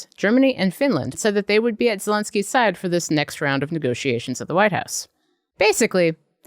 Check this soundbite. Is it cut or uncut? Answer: cut